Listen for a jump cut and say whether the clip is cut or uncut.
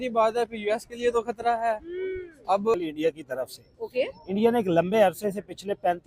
cut